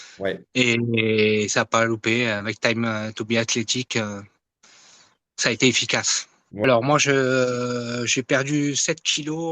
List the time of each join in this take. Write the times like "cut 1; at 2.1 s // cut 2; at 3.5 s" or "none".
cut 1; at 6.6 s